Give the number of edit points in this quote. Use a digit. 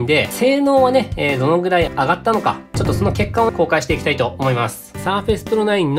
2